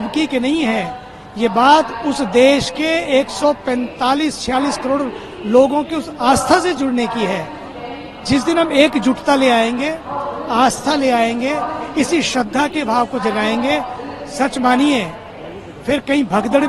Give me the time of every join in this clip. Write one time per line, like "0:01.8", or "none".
none